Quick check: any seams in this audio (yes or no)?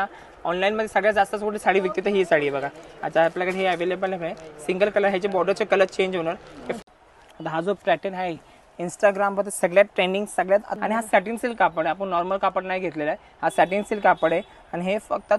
yes